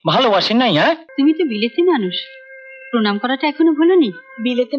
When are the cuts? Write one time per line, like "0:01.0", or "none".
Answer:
0:01.1